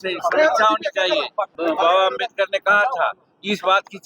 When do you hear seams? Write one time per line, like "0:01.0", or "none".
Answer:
0:01.5